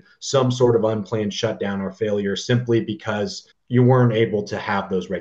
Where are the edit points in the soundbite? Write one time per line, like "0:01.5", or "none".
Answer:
0:03.5